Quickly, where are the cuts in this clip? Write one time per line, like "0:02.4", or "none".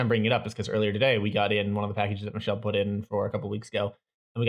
none